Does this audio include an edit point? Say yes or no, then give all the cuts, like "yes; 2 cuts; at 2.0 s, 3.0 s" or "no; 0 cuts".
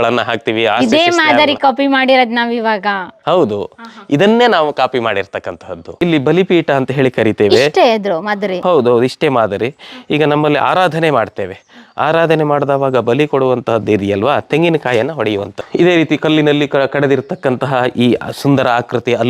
yes; 2 cuts; at 5.9 s, 15.6 s